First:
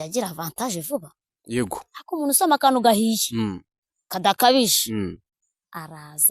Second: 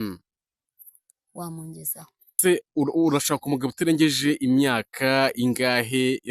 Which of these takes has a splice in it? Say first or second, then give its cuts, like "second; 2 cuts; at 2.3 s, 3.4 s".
second; 1 cut; at 2.4 s